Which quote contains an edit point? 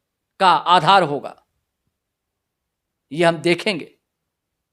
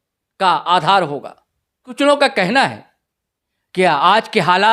second; 1 cut; at 1.9 s

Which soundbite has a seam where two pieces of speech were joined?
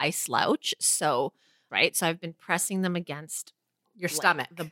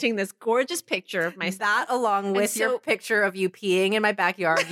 first; 1 cut; at 1.7 s

